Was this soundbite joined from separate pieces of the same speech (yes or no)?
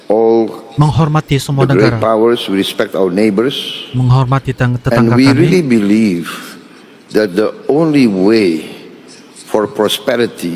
no